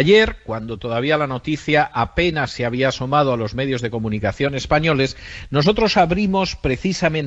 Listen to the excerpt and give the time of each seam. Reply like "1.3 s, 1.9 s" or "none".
5.4 s